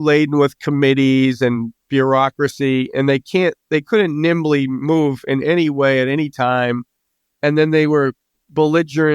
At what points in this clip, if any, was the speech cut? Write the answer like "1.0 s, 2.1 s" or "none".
none